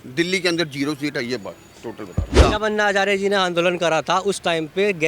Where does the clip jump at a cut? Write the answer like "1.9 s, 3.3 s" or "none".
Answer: 2.4 s